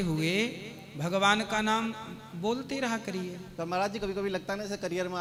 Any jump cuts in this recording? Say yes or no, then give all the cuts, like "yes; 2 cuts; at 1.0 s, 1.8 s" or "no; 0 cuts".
no; 0 cuts